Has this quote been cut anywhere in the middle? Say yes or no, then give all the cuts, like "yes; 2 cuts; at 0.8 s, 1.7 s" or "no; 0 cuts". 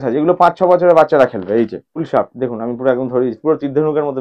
yes; 1 cut; at 1.9 s